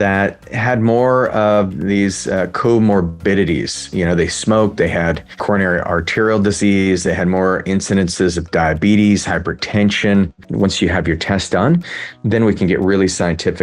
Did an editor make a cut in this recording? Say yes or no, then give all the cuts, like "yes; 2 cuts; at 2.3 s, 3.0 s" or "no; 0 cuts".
yes; 2 cuts; at 5.4 s, 10.4 s